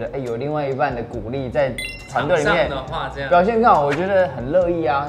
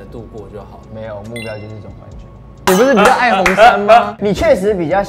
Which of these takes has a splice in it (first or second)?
second